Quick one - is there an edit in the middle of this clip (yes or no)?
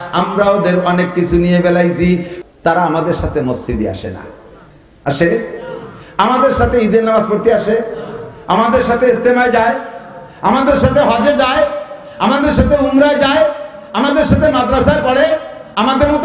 yes